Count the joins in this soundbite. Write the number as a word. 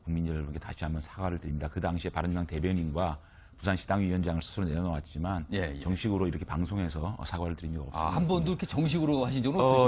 one